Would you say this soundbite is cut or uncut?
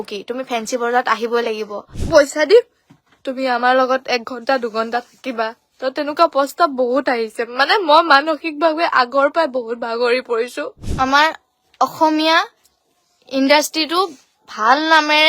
cut